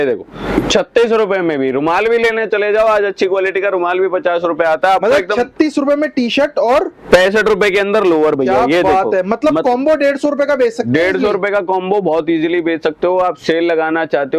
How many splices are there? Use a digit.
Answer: 0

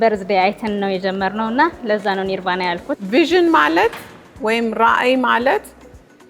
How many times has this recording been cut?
1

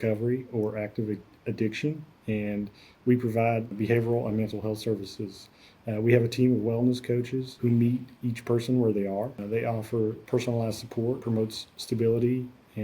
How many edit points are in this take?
2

